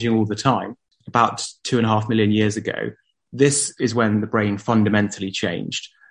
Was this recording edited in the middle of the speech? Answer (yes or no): yes